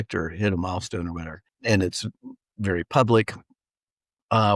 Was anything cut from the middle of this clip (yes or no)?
yes